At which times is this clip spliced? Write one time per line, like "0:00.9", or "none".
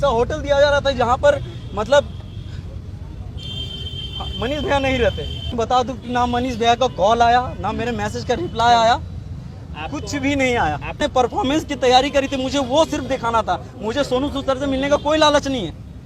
0:05.5
0:11.0